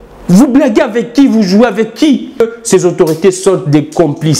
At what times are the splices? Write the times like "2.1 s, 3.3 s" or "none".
2.4 s